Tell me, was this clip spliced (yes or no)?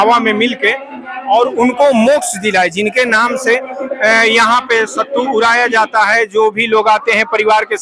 no